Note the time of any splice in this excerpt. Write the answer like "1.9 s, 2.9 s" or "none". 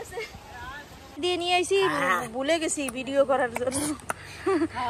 1.1 s